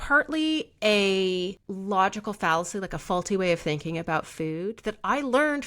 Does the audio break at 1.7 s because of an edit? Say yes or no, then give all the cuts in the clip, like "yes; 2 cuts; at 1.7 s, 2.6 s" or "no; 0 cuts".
yes; 1 cut; at 1.7 s